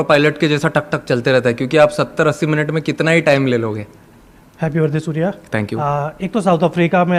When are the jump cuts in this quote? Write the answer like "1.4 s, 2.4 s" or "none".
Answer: none